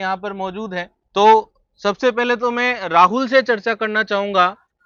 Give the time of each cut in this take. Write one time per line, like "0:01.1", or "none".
none